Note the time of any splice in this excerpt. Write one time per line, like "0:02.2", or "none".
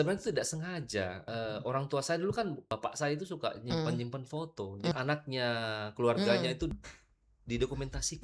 0:01.2
0:02.6
0:04.9
0:06.7